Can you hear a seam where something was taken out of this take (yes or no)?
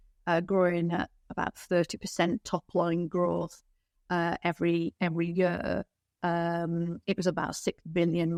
no